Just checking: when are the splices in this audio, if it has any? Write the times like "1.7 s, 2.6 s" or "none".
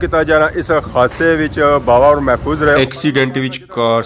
2.8 s